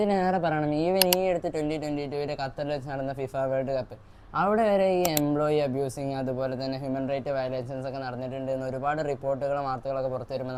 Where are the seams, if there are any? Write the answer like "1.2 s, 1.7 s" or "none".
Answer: none